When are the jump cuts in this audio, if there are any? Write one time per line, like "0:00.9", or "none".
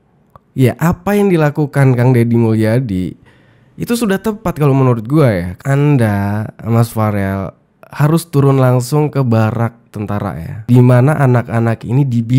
0:05.5